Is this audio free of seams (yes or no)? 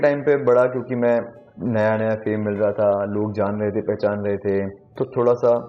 no